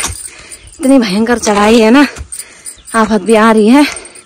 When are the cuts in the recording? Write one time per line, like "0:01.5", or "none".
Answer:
none